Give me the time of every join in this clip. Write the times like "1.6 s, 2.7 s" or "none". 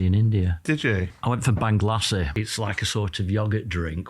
1.1 s, 2.3 s